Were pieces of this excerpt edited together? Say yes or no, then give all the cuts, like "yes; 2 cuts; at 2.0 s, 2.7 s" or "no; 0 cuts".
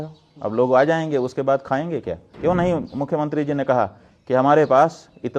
yes; 1 cut; at 2.2 s